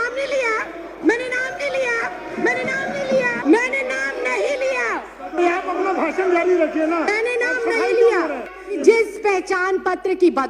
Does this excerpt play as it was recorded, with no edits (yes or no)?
no